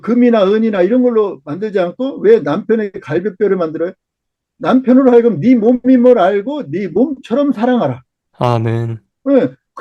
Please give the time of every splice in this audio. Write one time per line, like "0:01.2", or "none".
none